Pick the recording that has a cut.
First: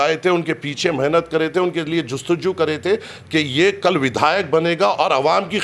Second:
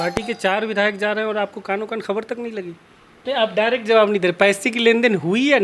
second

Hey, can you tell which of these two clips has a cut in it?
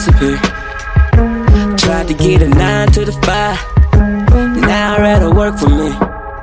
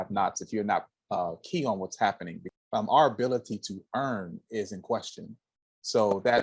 second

